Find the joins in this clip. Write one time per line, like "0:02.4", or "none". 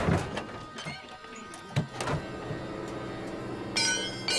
none